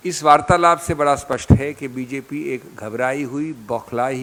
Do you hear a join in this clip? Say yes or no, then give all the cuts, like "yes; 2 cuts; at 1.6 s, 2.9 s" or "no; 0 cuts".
no; 0 cuts